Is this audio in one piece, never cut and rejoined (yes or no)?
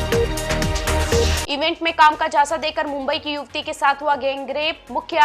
no